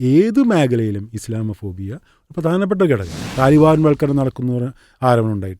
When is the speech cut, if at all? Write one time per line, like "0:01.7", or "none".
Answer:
0:03.2

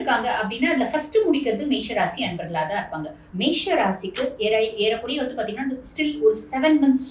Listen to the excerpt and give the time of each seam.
0:03.2

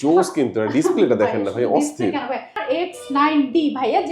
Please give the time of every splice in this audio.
0:02.6

